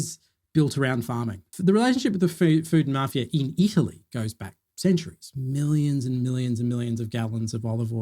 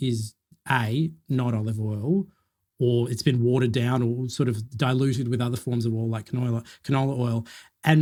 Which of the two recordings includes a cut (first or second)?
first